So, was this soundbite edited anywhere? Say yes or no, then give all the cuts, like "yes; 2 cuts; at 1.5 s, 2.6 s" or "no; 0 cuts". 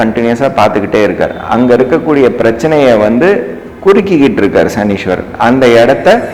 no; 0 cuts